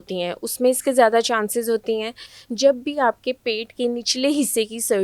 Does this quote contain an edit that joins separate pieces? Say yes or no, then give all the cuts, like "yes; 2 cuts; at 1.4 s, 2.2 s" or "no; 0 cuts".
no; 0 cuts